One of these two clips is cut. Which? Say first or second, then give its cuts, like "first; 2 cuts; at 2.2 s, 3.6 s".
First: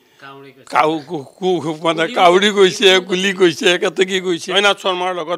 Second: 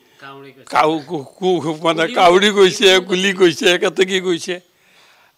first; 1 cut; at 4.5 s